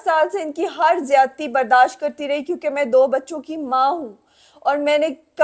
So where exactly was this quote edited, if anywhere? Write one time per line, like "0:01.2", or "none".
none